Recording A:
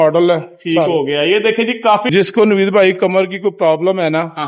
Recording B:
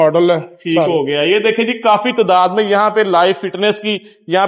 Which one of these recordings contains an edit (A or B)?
A